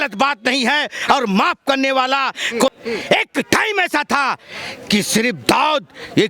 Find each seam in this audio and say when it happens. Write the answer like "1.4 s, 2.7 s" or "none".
2.7 s